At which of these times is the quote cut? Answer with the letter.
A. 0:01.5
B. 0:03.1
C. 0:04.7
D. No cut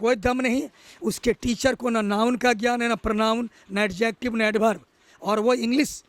D